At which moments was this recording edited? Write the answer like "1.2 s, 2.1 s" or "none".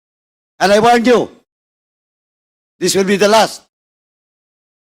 none